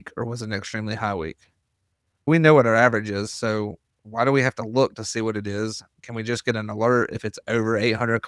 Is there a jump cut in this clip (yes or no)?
yes